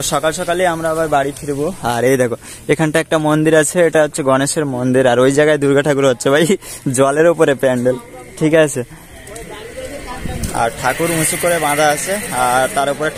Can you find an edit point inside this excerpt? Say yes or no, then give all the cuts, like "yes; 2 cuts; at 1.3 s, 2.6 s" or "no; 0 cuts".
no; 0 cuts